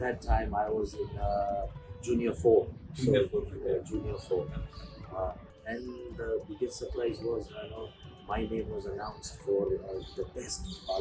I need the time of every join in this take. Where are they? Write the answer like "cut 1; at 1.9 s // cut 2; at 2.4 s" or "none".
cut 1; at 5.5 s